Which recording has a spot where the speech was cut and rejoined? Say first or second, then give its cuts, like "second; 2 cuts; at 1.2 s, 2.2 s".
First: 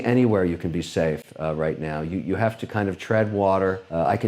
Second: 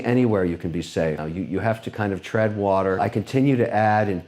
second; 2 cuts; at 1.2 s, 3.0 s